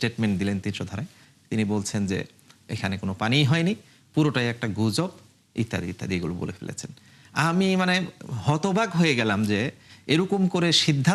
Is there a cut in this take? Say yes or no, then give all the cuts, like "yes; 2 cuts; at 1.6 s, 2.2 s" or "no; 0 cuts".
no; 0 cuts